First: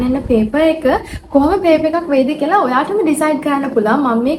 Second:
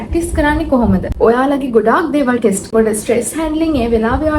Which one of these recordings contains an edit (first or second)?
second